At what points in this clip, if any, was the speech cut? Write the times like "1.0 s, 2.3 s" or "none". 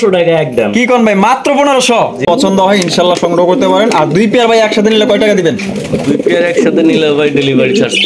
2.3 s